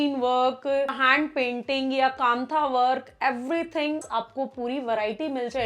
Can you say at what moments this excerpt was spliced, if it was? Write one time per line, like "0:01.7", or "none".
0:01.0
0:04.1